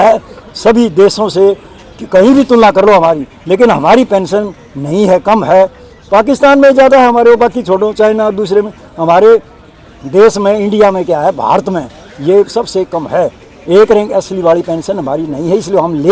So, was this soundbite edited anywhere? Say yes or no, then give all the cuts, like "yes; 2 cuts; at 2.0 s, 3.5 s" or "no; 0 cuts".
no; 0 cuts